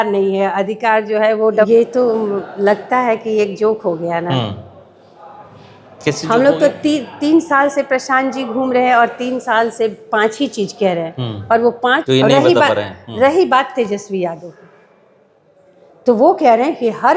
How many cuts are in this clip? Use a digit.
2